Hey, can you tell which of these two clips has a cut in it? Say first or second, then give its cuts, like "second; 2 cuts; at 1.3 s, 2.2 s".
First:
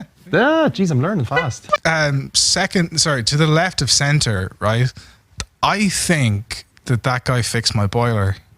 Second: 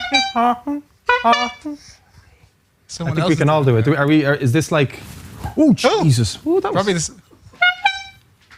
first; 1 cut; at 1.8 s